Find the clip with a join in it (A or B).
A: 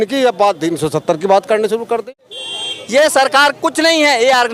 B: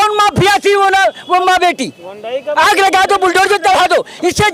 A